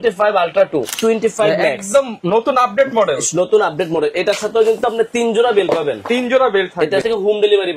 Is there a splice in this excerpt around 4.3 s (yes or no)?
no